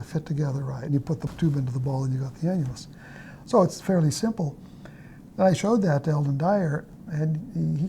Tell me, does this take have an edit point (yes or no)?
yes